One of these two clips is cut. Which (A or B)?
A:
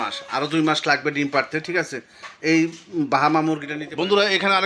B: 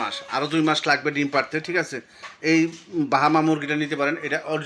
A